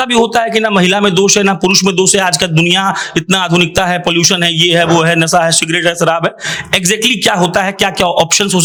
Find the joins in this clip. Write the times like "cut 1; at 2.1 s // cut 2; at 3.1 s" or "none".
none